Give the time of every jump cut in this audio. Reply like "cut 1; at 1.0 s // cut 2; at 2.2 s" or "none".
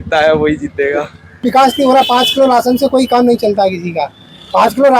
cut 1; at 1.4 s